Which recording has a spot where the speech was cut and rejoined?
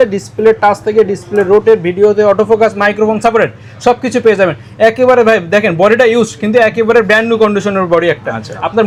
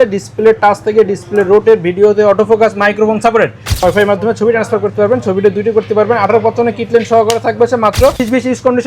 second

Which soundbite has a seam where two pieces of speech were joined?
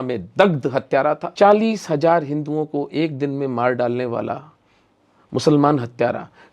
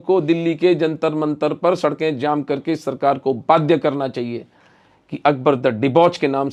first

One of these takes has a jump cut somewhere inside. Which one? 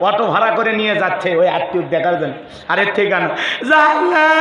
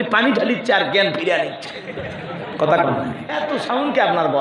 second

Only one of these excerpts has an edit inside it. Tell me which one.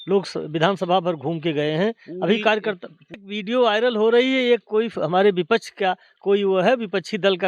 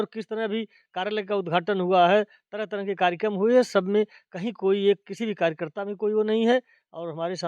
first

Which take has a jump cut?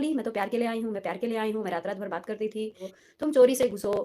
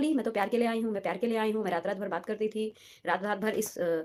first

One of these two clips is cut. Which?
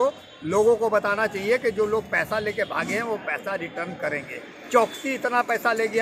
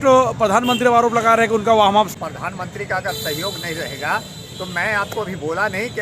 second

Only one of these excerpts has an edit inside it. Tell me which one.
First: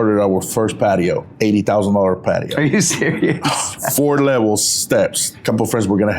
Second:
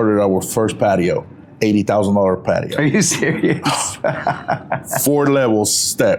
first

